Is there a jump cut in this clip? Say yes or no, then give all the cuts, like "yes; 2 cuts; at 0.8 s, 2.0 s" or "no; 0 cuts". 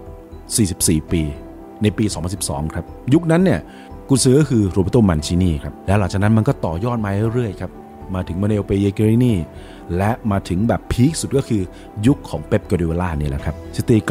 no; 0 cuts